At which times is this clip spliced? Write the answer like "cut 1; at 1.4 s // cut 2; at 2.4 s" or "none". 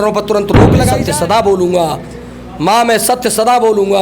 cut 1; at 0.9 s